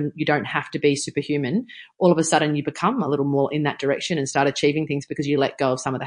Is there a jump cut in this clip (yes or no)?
no